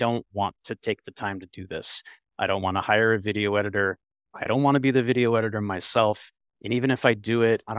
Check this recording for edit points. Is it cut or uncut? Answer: uncut